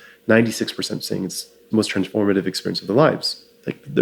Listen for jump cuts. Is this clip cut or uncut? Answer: uncut